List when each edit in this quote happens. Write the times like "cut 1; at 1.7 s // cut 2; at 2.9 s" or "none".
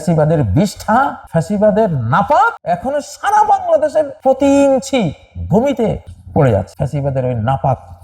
cut 1; at 1.2 s // cut 2; at 2.6 s // cut 3; at 4.1 s // cut 4; at 6.1 s // cut 5; at 6.7 s